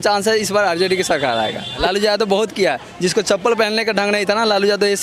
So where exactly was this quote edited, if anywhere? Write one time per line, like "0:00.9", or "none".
0:01.8

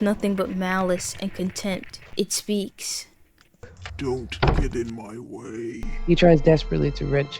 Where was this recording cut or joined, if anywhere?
0:02.0
0:03.8
0:05.9

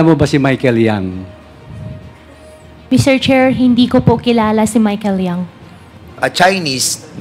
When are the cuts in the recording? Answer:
0:06.2

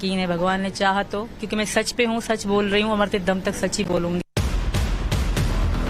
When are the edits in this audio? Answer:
0:04.2

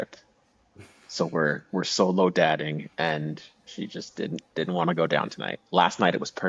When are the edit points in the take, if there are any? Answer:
none

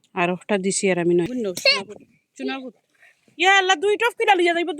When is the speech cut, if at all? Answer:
0:01.3

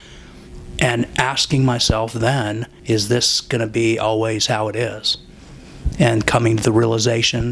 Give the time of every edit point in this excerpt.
0:02.7

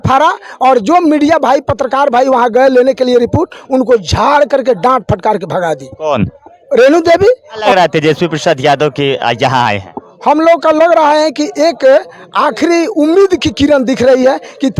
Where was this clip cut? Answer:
0:07.7

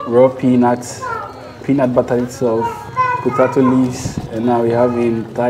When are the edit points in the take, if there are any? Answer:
0:02.8

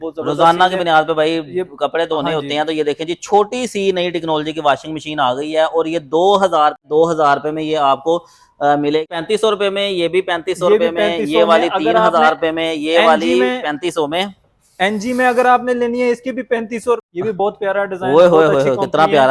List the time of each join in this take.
0:06.8
0:09.1
0:17.1

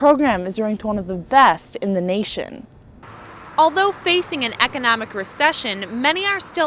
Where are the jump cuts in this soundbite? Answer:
0:03.1

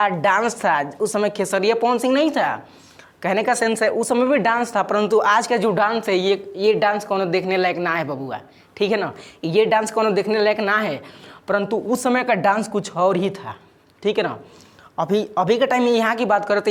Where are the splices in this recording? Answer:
none

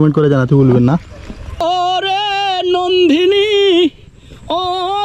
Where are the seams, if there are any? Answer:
0:01.6

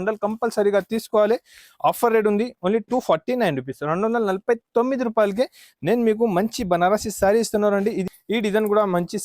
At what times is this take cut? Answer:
0:08.0

